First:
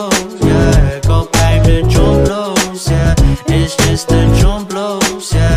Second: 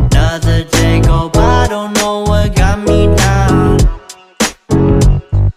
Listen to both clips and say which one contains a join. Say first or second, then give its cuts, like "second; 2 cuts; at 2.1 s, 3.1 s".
first; 1 cut; at 1.3 s